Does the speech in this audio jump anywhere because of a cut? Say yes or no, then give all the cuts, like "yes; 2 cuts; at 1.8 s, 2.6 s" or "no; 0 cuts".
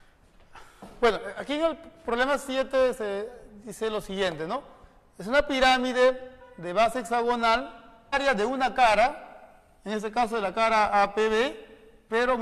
no; 0 cuts